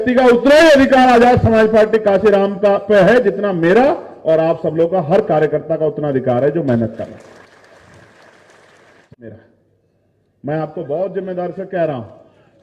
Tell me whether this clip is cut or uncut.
cut